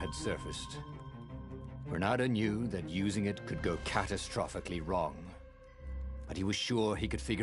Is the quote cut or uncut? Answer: cut